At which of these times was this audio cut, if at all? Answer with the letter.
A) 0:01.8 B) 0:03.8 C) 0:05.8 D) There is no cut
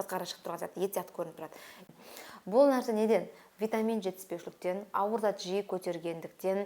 A